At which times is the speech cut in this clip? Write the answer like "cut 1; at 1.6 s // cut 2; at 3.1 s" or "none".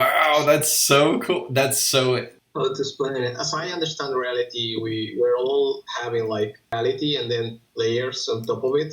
cut 1; at 2.4 s // cut 2; at 6.7 s